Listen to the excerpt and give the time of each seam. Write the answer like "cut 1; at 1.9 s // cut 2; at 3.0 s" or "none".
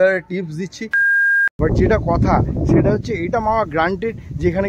cut 1; at 1.1 s